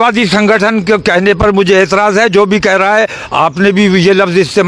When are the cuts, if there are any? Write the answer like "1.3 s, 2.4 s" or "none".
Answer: none